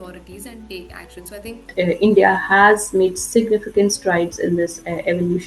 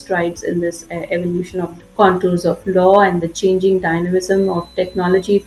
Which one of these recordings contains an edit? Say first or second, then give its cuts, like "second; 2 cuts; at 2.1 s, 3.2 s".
first; 1 cut; at 1.7 s